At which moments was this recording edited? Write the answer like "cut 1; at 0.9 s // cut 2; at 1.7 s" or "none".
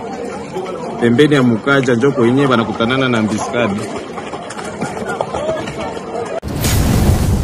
cut 1; at 6.4 s